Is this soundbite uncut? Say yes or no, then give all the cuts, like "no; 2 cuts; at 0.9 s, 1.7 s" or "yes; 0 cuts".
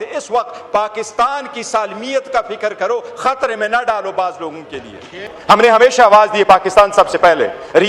no; 1 cut; at 5.2 s